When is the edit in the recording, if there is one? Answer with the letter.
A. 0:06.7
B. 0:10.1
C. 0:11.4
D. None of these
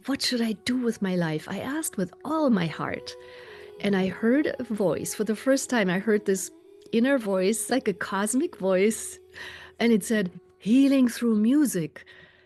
D